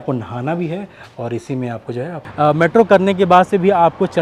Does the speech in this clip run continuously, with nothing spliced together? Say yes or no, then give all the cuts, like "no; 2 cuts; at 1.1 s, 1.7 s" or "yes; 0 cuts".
no; 1 cut; at 2.2 s